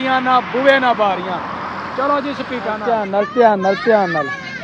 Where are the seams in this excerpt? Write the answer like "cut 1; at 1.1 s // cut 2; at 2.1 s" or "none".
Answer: cut 1; at 2.8 s